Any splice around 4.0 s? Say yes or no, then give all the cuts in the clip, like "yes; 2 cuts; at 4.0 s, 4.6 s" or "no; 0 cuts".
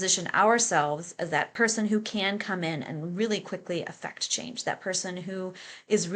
no; 1 cut; at 1.5 s